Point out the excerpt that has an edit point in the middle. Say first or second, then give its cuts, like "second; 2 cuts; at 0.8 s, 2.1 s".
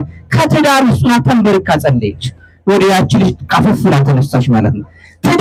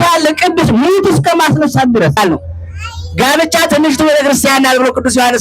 second; 1 cut; at 2.2 s